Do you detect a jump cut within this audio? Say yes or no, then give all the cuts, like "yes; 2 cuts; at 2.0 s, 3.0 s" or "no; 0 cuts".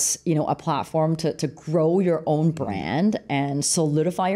no; 0 cuts